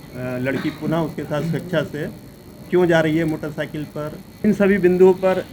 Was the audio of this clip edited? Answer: yes; 1 cut; at 4.4 s

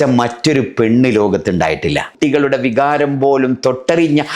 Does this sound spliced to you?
yes; 1 cut; at 2.1 s

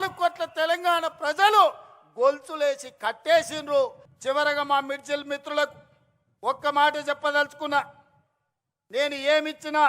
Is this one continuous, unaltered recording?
no; 1 cut; at 4.1 s

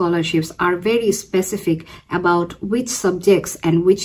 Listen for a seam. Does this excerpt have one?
no; 0 cuts

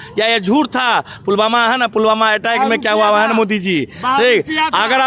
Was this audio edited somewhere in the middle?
no; 0 cuts

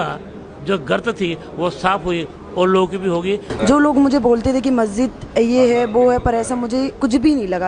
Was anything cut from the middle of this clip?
yes; 1 cut; at 3.5 s

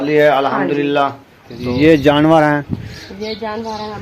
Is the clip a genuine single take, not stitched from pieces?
no; 1 cut; at 1.6 s

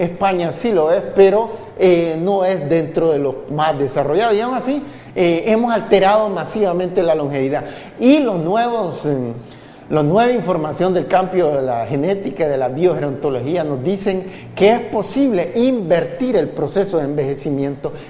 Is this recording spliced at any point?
yes; 1 cut; at 4.2 s

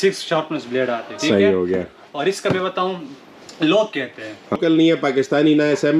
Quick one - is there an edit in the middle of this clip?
yes; 1 cut; at 4.6 s

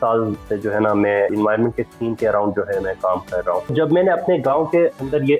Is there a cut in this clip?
yes; 2 cuts; at 1.3 s, 3.7 s

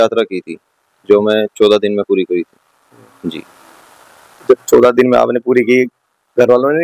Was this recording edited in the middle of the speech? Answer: no; 0 cuts

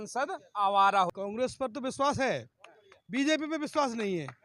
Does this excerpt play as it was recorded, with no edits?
no; 1 cut; at 1.1 s

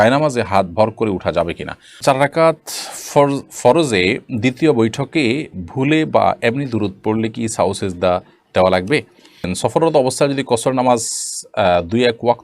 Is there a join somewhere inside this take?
yes; 2 cuts; at 2.0 s, 9.5 s

